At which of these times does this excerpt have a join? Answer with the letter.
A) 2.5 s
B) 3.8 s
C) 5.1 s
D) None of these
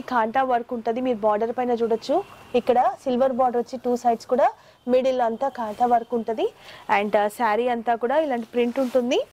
D